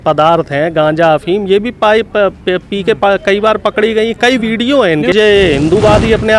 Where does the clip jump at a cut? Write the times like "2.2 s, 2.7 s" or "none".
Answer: 5.1 s